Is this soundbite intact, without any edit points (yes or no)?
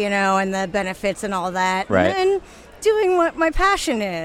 yes